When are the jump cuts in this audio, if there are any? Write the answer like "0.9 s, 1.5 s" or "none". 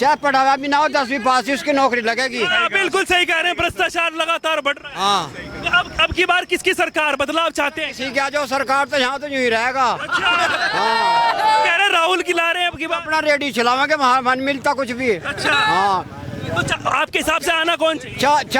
none